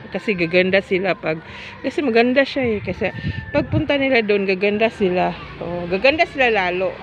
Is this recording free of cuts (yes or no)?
yes